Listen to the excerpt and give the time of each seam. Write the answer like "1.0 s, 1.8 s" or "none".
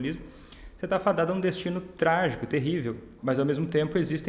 3.1 s